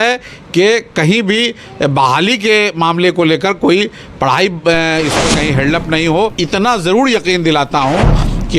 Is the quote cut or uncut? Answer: cut